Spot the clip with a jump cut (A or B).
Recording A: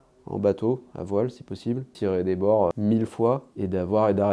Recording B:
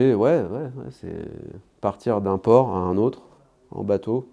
A